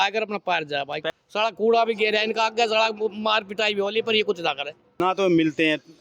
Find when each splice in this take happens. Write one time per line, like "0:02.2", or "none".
0:01.0
0:05.0

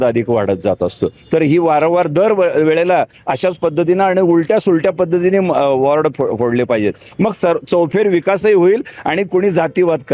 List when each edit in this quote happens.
none

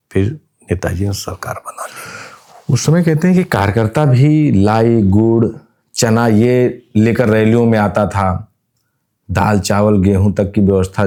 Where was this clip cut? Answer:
none

